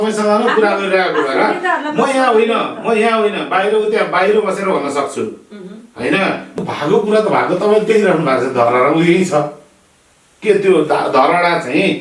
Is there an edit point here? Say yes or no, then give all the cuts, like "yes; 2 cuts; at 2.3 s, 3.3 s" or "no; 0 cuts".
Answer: yes; 1 cut; at 6.6 s